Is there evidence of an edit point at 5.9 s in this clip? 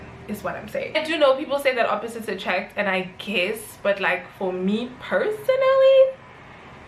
no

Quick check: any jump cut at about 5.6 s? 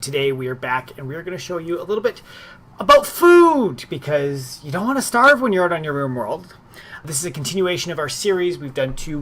yes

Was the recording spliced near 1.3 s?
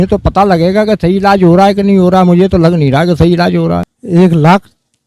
no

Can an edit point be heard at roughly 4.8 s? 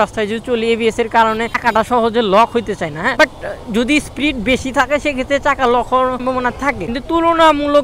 no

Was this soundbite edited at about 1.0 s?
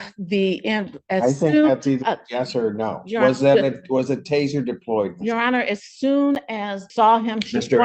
no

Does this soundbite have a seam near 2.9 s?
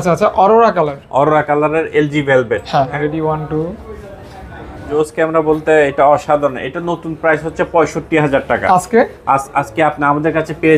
yes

